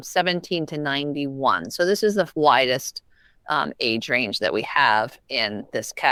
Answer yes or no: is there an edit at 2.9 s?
no